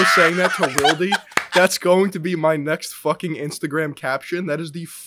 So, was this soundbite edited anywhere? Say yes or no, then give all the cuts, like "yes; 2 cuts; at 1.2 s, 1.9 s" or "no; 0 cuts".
no; 0 cuts